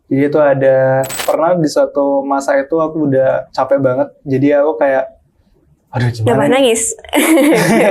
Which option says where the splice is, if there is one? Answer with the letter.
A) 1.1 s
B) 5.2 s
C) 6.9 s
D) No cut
A